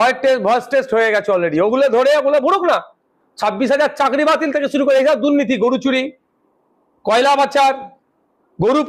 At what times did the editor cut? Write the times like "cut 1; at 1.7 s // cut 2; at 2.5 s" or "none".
none